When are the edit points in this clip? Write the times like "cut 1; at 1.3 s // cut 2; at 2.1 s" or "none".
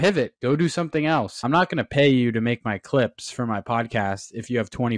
cut 1; at 1.3 s

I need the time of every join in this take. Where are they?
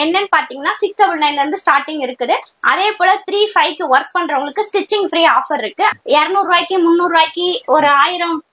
cut 1; at 5.9 s

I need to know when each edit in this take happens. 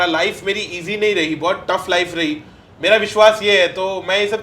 cut 1; at 2.6 s

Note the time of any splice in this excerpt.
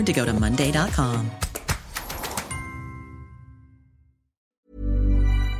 cut 1; at 4.4 s

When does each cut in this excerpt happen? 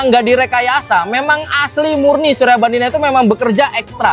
none

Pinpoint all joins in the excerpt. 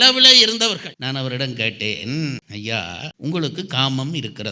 cut 1; at 0.9 s

